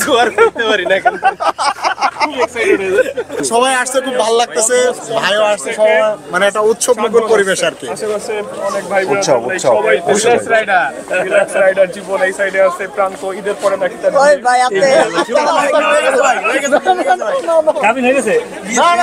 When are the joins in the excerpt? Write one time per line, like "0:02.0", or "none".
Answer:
0:03.4